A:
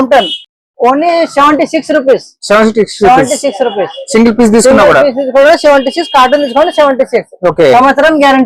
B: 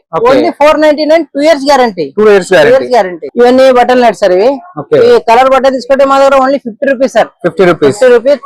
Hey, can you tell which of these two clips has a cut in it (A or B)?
B